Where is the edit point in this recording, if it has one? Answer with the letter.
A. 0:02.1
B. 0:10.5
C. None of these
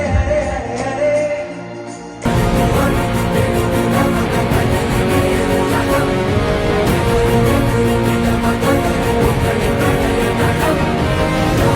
A